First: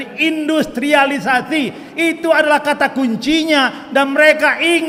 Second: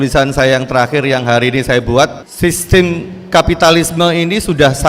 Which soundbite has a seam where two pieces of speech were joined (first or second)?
second